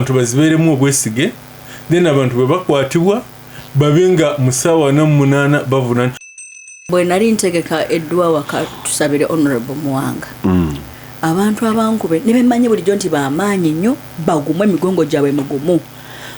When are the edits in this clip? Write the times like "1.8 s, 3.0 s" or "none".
6.3 s